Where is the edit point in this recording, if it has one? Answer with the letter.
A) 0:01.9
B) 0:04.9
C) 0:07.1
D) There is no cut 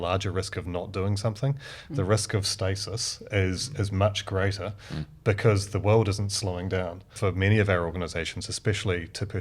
C